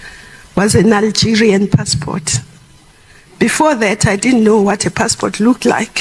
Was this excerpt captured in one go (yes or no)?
yes